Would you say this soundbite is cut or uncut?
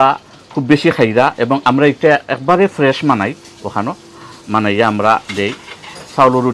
uncut